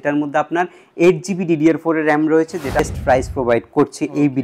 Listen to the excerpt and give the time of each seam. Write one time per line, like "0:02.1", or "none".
0:02.8